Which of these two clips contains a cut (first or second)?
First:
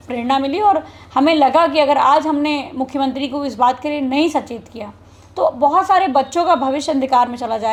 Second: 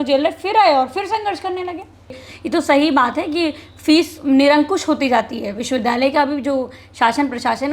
second